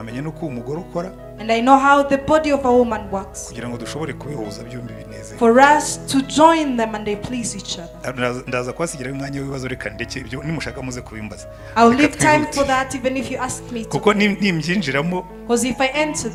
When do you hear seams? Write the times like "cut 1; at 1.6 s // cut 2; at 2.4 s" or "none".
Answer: none